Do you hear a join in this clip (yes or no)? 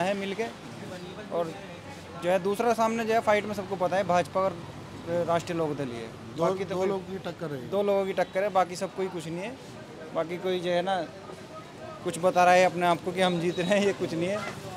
no